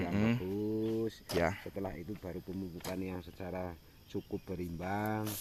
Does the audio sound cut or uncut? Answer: uncut